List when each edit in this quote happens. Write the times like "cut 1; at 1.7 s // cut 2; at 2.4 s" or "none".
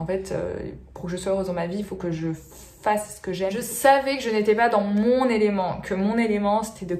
cut 1; at 3.6 s

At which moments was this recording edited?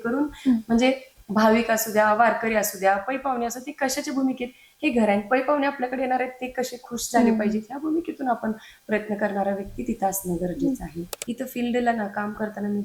cut 1; at 11.2 s

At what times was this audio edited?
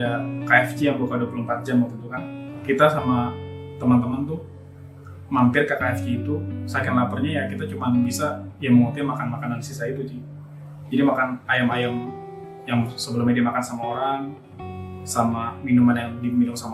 cut 1; at 2.5 s

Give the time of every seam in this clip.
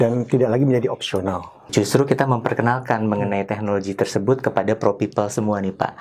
cut 1; at 1.6 s

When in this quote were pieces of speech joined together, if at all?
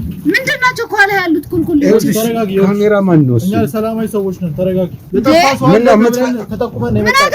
cut 1; at 5.0 s

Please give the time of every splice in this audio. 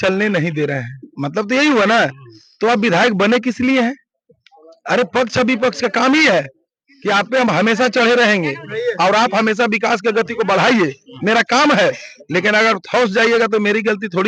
none

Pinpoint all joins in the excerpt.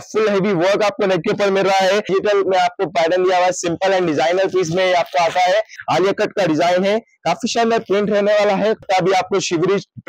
cut 1; at 2.1 s // cut 2; at 5.7 s // cut 3; at 8.8 s

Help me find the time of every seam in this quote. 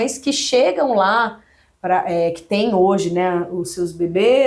none

